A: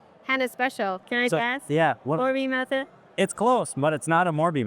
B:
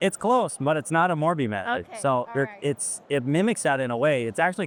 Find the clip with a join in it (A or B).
A